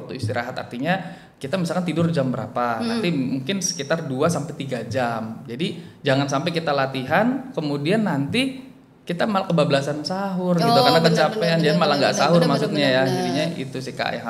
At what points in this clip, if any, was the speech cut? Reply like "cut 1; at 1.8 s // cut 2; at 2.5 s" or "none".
none